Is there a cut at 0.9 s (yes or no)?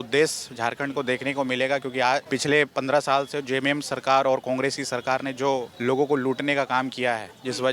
no